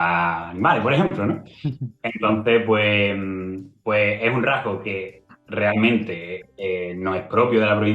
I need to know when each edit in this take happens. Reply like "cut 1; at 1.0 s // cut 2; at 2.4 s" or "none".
none